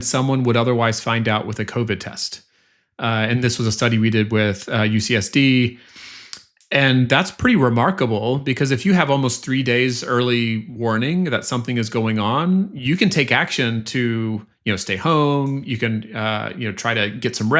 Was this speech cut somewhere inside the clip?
no; 0 cuts

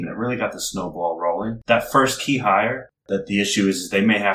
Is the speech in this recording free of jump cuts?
no; 2 cuts; at 1.6 s, 2.9 s

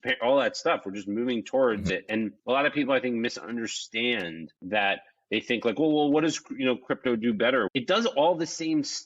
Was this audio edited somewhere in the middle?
yes; 1 cut; at 7.7 s

